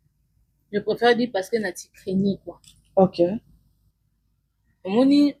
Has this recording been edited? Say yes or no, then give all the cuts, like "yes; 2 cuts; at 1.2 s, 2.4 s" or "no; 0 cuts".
no; 0 cuts